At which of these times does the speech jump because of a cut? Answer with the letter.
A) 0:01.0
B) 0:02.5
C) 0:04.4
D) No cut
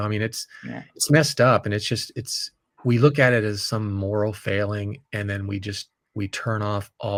D